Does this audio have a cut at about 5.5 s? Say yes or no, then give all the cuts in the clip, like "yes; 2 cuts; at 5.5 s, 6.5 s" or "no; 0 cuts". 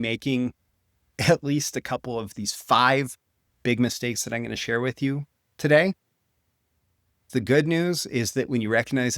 no; 2 cuts; at 2.3 s, 7.3 s